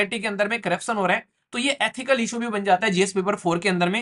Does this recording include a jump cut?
no; 0 cuts

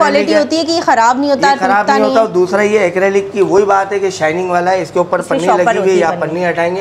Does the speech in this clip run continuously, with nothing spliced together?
yes; 0 cuts

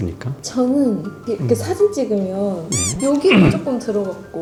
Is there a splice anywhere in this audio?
no; 0 cuts

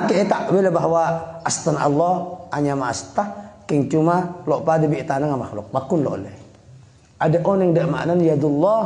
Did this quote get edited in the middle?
no; 0 cuts

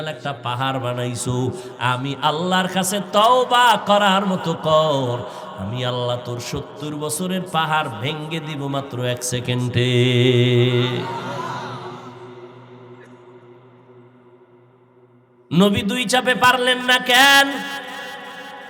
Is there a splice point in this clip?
no; 0 cuts

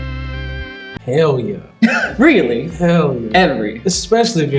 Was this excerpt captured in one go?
no; 1 cut; at 0.9 s

